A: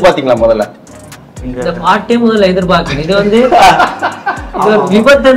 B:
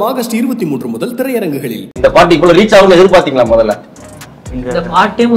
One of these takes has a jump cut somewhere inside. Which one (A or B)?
B